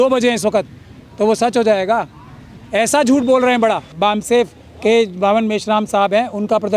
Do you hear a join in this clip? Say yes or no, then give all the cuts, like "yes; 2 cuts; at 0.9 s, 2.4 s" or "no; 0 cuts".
yes; 1 cut; at 3.9 s